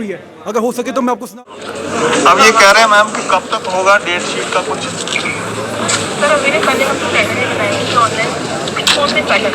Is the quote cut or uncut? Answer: cut